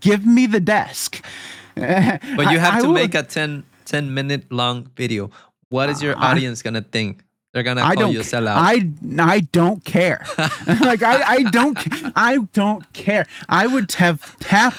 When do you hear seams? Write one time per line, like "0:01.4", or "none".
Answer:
none